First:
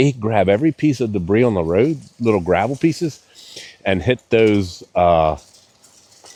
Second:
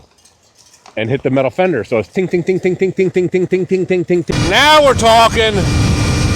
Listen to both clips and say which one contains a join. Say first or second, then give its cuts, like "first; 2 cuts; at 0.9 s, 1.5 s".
second; 1 cut; at 4.3 s